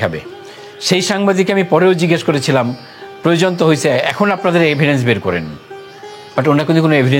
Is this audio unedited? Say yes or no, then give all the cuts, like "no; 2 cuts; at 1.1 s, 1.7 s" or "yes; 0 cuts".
yes; 0 cuts